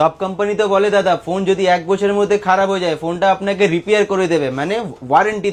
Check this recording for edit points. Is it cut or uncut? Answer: uncut